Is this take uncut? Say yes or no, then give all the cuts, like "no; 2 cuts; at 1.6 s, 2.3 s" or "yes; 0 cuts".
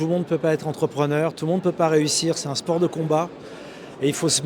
yes; 0 cuts